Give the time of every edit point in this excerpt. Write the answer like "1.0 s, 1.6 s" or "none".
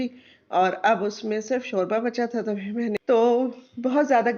2.9 s

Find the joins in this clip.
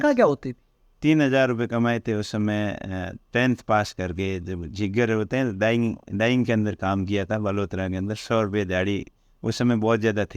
none

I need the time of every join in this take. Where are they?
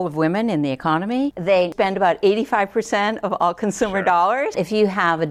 1.6 s, 4.5 s

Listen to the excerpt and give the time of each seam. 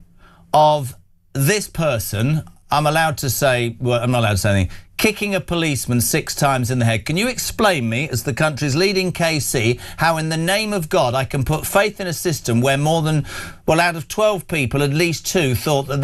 none

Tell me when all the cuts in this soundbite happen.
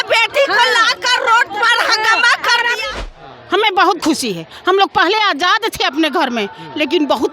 3.1 s

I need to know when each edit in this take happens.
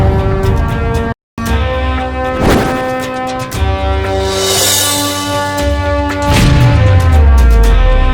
none

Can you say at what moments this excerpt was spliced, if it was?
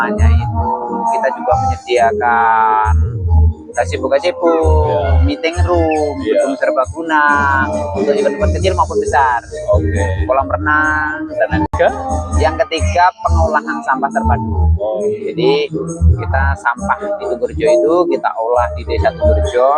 11.7 s

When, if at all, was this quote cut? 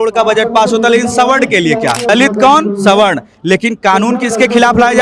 2.1 s

